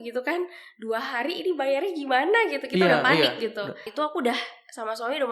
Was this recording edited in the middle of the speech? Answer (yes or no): yes